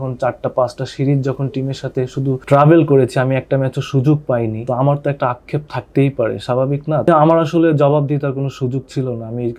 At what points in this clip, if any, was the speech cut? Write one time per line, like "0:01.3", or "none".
0:02.4
0:04.6
0:07.1